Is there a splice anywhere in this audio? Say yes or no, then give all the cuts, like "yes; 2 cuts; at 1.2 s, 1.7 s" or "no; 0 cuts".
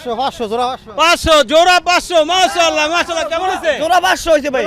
no; 0 cuts